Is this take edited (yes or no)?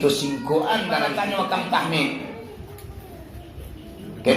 yes